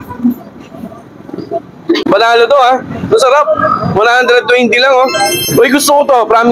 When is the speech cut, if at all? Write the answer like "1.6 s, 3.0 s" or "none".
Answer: 1.9 s, 5.3 s

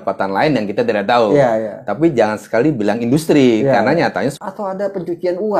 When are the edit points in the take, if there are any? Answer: 4.4 s

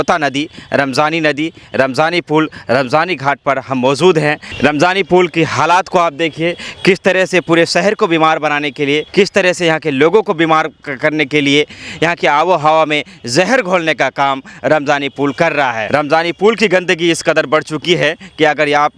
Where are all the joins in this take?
4.5 s

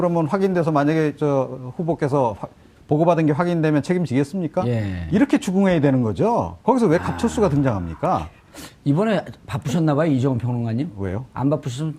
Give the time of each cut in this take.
none

